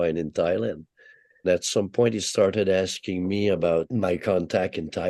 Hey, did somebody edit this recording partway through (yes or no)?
yes